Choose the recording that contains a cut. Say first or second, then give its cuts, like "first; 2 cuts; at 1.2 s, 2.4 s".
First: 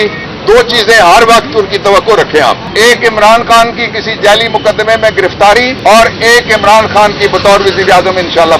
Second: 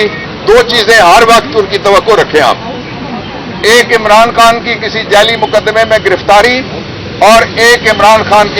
first; 2 cuts; at 2.6 s, 5.7 s